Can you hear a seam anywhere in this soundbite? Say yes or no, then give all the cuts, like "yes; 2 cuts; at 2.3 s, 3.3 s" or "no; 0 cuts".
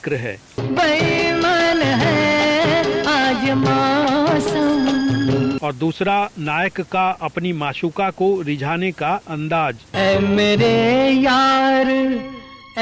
no; 0 cuts